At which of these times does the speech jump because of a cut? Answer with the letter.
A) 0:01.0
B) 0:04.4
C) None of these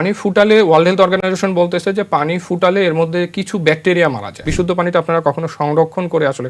B